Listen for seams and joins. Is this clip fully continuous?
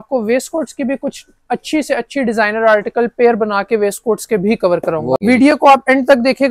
no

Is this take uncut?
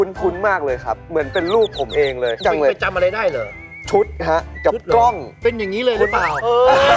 yes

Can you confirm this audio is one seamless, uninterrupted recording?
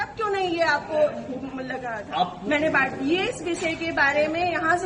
no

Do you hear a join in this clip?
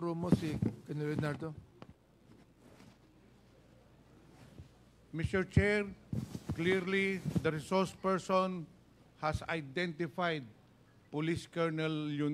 no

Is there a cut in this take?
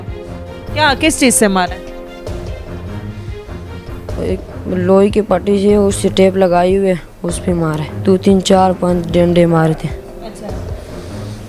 yes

